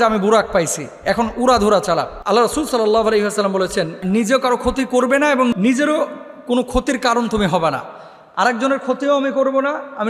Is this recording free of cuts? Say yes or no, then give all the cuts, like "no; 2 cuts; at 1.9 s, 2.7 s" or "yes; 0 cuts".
yes; 0 cuts